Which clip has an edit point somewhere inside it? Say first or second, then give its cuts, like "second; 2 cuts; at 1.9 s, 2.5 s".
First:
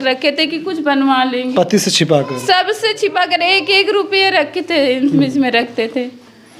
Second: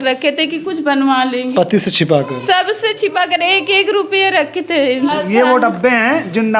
second; 1 cut; at 5.1 s